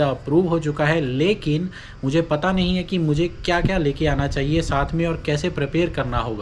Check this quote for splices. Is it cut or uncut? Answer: uncut